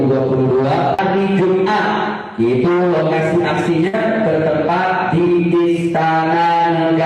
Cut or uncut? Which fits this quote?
cut